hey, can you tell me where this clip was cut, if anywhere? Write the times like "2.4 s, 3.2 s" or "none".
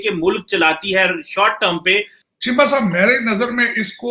2.1 s